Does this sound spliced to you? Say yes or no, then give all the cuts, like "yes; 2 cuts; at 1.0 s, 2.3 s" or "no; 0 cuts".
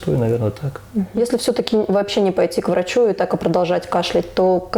no; 0 cuts